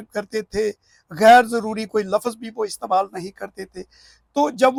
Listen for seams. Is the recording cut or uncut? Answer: uncut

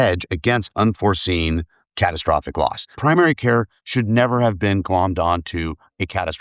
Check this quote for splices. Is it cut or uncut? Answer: cut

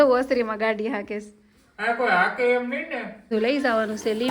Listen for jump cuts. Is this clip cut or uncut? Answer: cut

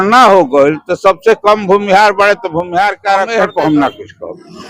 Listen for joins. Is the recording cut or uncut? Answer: cut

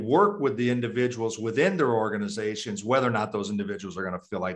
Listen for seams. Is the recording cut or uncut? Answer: uncut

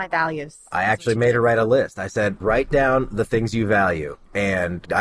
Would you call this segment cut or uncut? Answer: cut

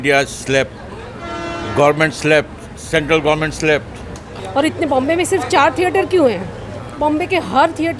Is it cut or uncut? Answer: cut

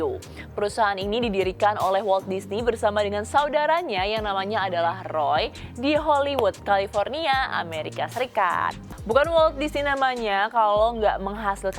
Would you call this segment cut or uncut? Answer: cut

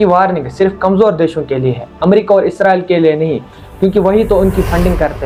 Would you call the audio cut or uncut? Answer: uncut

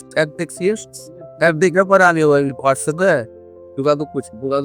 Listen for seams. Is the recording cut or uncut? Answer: uncut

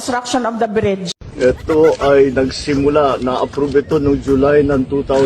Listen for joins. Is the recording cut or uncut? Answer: cut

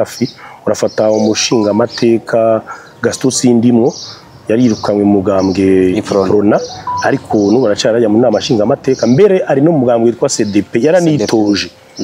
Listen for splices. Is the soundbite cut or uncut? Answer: uncut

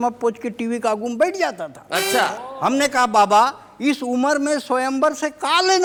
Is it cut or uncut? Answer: uncut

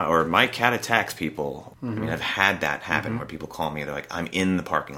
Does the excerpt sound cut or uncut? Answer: cut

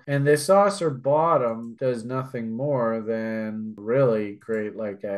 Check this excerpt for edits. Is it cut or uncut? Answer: cut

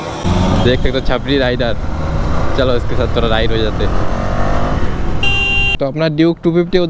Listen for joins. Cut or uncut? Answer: cut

